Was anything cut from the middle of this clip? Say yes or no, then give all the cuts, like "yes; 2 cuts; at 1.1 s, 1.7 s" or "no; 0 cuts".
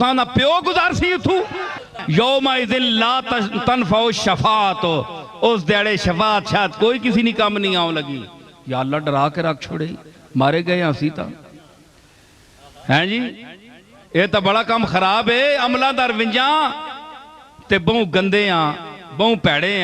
yes; 1 cut; at 1.9 s